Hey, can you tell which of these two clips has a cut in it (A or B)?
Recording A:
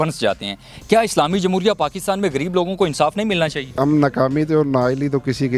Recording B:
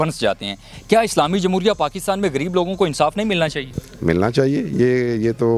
A